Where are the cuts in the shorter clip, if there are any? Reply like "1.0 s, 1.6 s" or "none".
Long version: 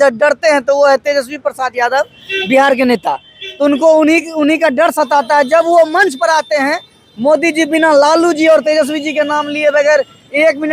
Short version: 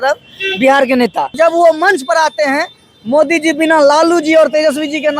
1.3 s